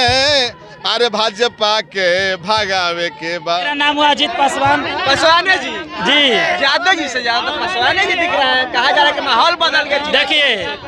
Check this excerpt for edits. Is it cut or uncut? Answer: cut